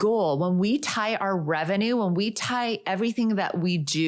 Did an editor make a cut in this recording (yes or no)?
no